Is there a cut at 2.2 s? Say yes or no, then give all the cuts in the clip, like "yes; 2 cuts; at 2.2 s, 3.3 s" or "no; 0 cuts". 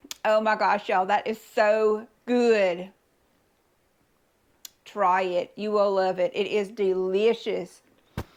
no; 0 cuts